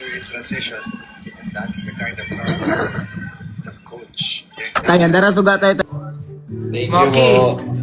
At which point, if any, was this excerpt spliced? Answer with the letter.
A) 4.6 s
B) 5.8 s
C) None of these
B